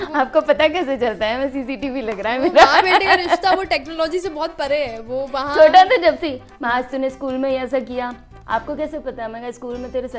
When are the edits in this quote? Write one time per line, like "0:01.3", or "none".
none